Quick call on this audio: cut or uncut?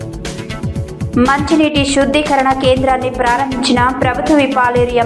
cut